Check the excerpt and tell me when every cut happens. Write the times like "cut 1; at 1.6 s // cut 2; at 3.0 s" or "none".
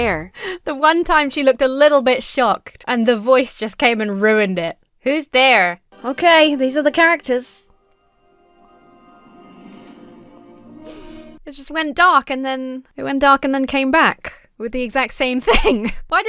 cut 1; at 2.7 s // cut 2; at 5.9 s // cut 3; at 11.3 s